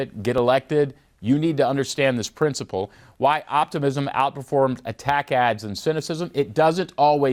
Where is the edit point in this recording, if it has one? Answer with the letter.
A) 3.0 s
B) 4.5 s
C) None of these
C